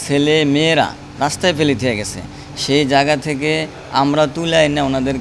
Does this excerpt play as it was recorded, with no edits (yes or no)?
yes